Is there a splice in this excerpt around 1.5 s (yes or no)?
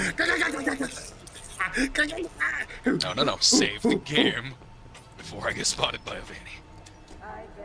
no